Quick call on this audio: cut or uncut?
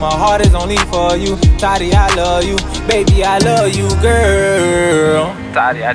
uncut